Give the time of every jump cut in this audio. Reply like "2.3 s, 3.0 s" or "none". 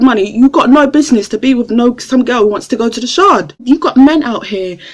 3.5 s